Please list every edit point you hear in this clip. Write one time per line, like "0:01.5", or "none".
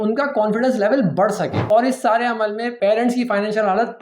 0:01.5
0:02.7